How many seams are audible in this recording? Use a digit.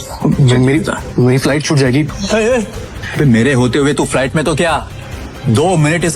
2